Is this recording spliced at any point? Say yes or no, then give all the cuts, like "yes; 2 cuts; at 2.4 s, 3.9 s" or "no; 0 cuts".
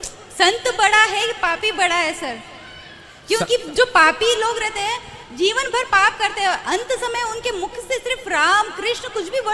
no; 0 cuts